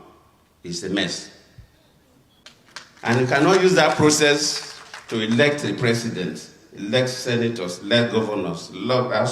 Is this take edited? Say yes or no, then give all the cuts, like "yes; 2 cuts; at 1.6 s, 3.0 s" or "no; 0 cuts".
yes; 1 cut; at 2.4 s